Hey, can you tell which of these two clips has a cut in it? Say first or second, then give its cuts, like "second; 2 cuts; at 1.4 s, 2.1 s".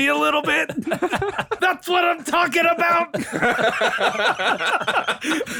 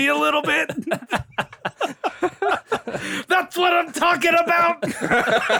first; 1 cut; at 1.5 s